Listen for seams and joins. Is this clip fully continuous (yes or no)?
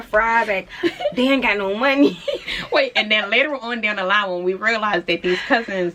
yes